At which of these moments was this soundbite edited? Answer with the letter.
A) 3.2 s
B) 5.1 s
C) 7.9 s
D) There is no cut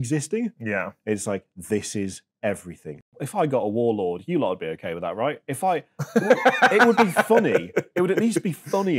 A